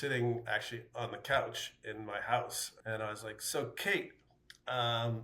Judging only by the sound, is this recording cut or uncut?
cut